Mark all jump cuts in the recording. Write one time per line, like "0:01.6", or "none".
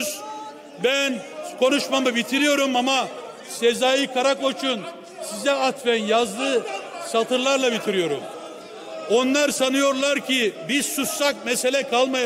none